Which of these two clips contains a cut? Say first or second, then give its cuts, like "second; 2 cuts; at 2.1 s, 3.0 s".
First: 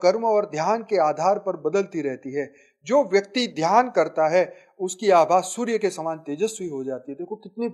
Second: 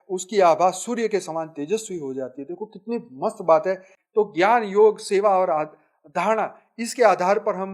second; 1 cut; at 3.9 s